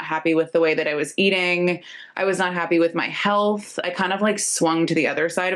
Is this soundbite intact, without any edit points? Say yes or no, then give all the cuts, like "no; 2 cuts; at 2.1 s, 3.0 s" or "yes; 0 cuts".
yes; 0 cuts